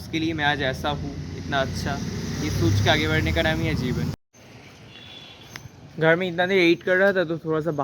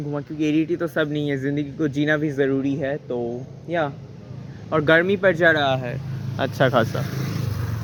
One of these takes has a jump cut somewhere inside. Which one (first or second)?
first